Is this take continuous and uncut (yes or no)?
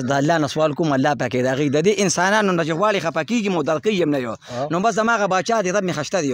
yes